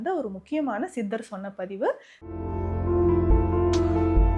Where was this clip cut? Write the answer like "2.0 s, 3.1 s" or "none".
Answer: 2.1 s